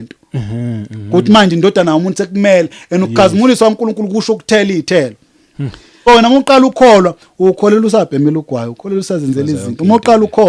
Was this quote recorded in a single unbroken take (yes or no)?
no